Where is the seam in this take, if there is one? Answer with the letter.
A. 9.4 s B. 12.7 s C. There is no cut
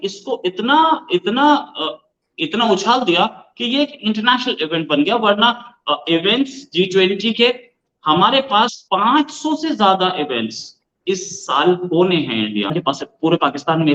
B